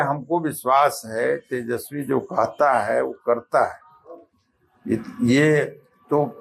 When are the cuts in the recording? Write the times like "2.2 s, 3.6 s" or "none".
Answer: none

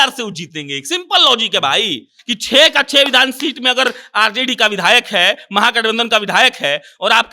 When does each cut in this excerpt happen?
2.2 s

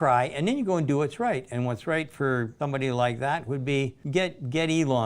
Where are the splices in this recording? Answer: 2.5 s, 4.0 s

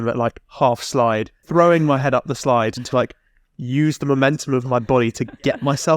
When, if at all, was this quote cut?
1.4 s

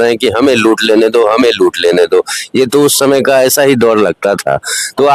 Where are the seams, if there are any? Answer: none

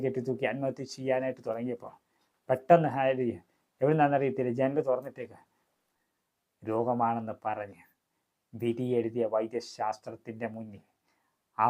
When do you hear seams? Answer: 5.8 s

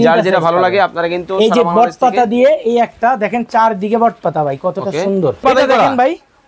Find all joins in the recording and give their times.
5.4 s

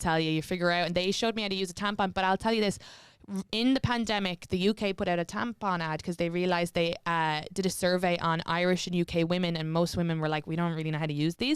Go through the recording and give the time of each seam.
none

